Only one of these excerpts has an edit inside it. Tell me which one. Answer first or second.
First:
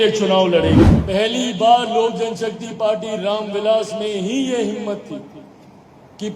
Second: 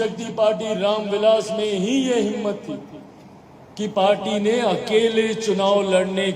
first